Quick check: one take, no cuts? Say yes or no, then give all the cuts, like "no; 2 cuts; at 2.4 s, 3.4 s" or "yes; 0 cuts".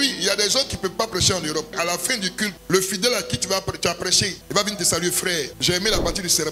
yes; 0 cuts